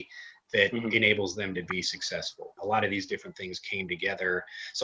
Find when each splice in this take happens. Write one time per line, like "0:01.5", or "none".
0:02.5